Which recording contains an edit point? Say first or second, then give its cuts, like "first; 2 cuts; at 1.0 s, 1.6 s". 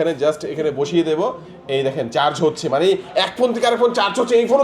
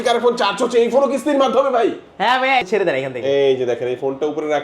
second; 1 cut; at 2.6 s